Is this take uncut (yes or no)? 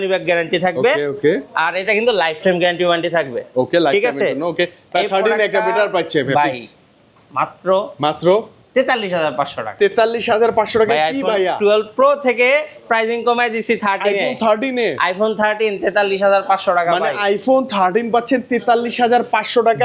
yes